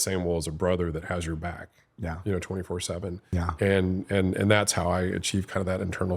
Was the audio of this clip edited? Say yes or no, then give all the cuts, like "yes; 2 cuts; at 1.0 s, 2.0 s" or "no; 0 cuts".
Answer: yes; 1 cut; at 3.2 s